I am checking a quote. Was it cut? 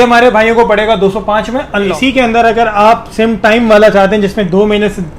yes; 1 cut; at 1.9 s

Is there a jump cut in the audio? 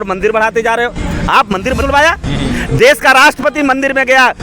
yes; 1 cut; at 1.8 s

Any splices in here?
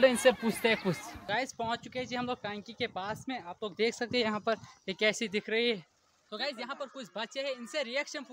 yes; 2 cuts; at 1.1 s, 6.2 s

